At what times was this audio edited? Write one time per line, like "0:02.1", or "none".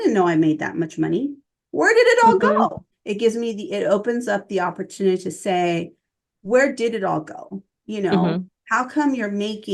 0:02.9